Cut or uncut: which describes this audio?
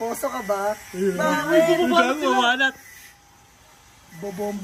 uncut